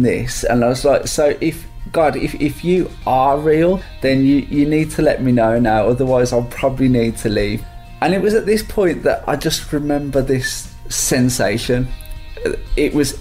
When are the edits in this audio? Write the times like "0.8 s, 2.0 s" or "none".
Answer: 3.9 s, 7.6 s

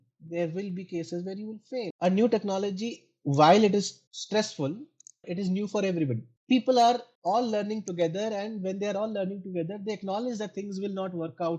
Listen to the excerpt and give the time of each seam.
1.9 s, 5.3 s, 6.3 s

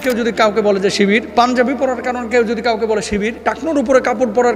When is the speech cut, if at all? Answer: 1.3 s, 3.4 s

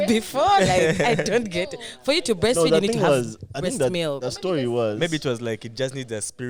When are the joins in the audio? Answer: none

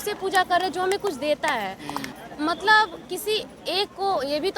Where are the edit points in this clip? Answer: 2.2 s

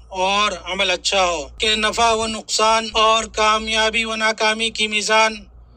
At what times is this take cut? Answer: 1.5 s, 2.9 s

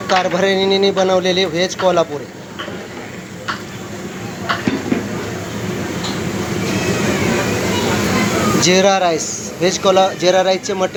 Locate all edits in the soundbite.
none

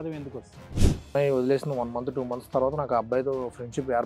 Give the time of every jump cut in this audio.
1.1 s

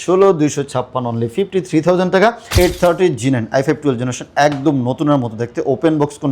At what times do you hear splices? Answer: 2.5 s

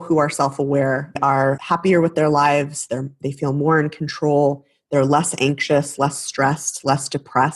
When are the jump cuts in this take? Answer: 1.5 s

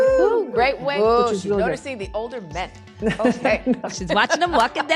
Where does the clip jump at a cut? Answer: 1.0 s

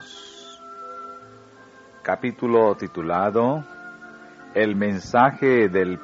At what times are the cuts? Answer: 5.0 s

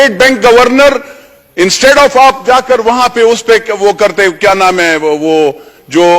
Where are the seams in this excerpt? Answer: none

